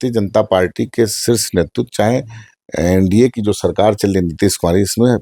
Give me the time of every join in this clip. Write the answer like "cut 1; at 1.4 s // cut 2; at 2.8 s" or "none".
none